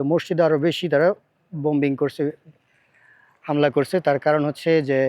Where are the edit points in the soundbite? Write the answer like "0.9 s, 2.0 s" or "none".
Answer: none